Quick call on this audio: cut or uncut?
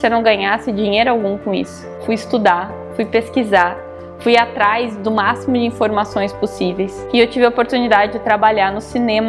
cut